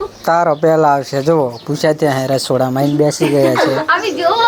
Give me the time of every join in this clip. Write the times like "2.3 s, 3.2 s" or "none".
none